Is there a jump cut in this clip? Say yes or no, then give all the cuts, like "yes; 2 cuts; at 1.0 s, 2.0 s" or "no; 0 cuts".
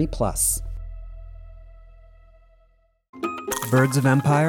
yes; 1 cut; at 3.2 s